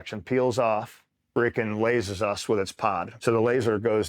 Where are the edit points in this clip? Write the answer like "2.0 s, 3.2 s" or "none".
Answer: 1.2 s, 3.1 s